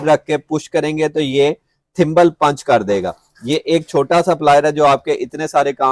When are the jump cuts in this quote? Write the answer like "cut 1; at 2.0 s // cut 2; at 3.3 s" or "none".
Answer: none

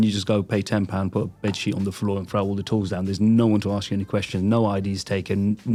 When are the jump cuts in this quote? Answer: none

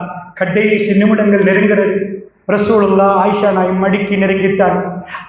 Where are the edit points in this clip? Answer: none

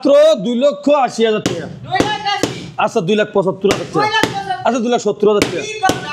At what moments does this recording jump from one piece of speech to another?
none

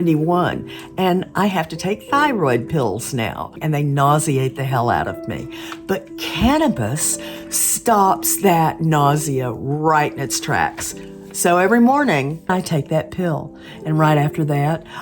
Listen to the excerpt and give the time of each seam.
cut 1; at 3.6 s // cut 2; at 12.5 s

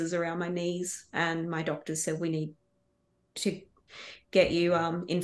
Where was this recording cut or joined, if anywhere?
none

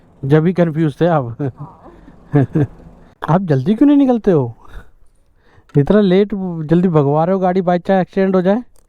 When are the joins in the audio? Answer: cut 1; at 3.1 s

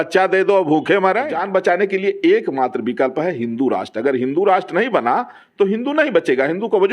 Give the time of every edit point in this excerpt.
cut 1; at 1.4 s

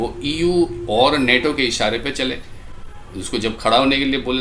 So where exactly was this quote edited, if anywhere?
none

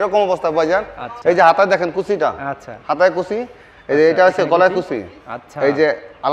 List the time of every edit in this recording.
cut 1; at 1.0 s

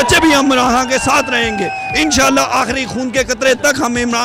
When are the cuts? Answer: none

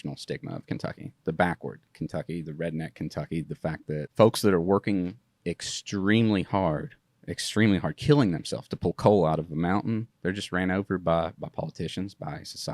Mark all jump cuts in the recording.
cut 1; at 1.1 s // cut 2; at 4.1 s // cut 3; at 10.1 s

